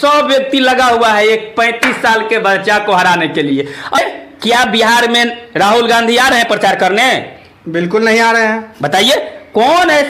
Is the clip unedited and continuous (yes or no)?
no